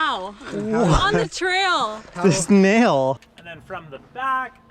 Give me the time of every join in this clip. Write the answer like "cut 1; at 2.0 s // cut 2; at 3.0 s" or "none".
cut 1; at 3.3 s